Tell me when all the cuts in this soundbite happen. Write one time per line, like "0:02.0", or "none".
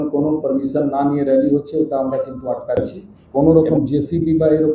0:02.8